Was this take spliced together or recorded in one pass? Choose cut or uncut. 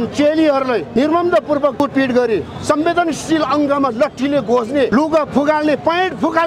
cut